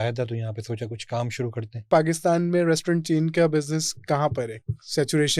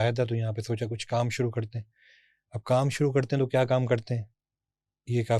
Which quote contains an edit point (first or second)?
first